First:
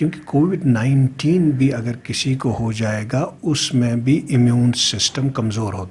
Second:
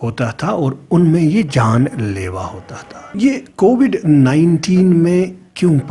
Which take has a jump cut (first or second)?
second